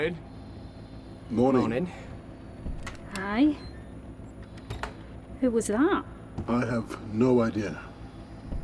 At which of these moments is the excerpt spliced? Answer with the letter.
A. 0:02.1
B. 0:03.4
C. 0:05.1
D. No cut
C